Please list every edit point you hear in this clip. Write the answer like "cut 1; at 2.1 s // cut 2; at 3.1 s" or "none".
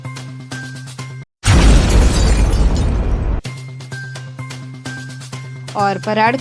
cut 1; at 1.3 s // cut 2; at 5.3 s